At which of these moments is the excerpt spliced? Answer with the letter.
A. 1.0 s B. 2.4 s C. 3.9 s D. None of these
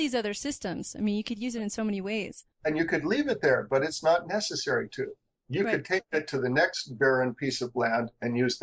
B